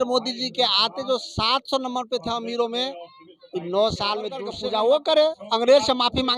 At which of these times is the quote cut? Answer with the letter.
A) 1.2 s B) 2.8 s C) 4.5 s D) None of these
C